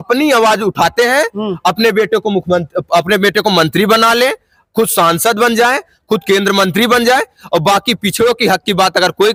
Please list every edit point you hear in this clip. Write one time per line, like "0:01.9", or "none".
none